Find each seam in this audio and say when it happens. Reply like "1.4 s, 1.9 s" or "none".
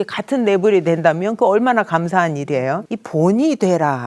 2.9 s